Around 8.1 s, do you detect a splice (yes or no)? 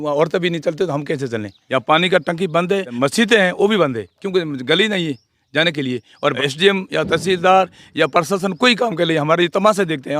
no